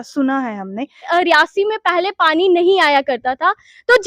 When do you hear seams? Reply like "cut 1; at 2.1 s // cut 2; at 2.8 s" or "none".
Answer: cut 1; at 1.0 s